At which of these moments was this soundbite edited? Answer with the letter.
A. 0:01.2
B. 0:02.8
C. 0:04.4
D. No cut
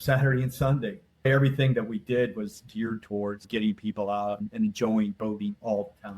A